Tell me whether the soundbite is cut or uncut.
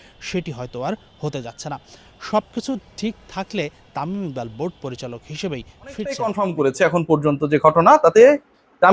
cut